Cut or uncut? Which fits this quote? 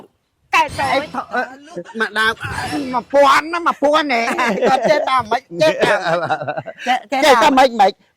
cut